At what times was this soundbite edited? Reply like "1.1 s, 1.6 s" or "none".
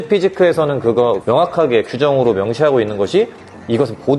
none